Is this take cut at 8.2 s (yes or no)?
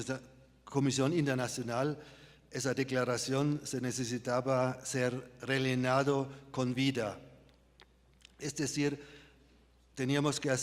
yes